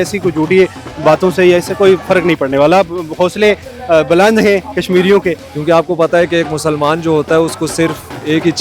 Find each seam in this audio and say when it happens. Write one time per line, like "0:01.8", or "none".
0:05.4